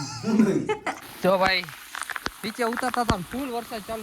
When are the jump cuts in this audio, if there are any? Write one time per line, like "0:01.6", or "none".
0:01.1